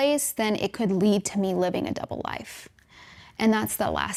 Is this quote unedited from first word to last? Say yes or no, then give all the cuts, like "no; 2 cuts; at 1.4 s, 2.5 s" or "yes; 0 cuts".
yes; 0 cuts